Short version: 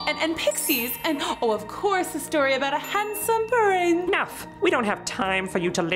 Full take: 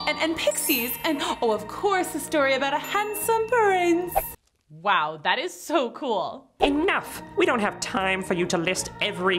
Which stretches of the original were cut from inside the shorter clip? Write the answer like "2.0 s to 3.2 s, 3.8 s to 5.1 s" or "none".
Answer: 4.1 s to 6.8 s

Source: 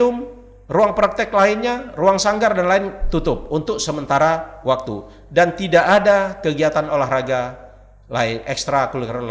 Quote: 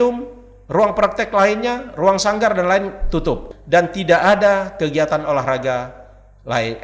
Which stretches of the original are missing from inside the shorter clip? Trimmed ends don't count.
3.4 s to 5.1 s

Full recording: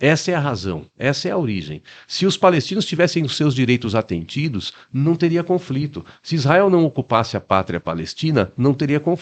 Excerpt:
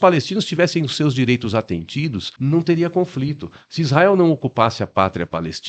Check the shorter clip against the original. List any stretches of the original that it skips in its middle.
4.7 s to 4.8 s

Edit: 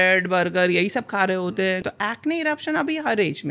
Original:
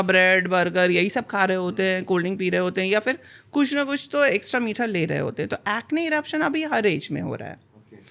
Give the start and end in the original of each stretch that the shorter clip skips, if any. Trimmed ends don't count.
2.0 s to 5.5 s

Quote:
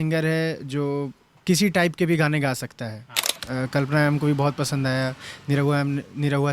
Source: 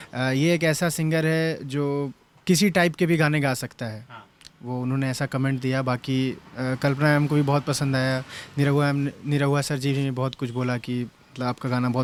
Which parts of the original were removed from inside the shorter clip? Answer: 4.4 s to 6.5 s

